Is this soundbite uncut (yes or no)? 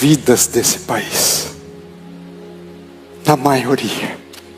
no